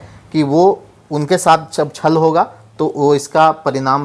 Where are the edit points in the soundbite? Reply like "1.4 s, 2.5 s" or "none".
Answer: none